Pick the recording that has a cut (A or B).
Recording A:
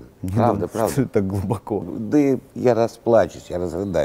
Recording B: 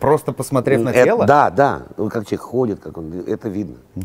A